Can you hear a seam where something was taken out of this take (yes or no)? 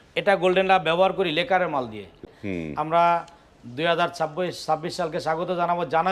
yes